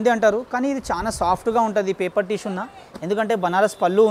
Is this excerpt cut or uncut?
uncut